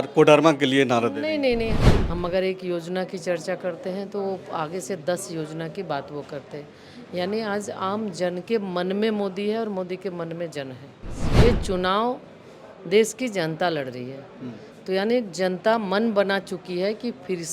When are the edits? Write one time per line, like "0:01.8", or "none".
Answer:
0:01.8
0:11.2